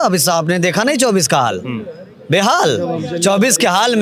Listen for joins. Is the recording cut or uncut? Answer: uncut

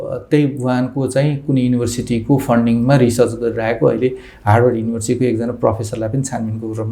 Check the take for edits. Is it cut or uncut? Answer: uncut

